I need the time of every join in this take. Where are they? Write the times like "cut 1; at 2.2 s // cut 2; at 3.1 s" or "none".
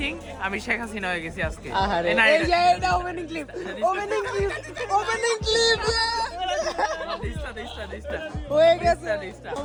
none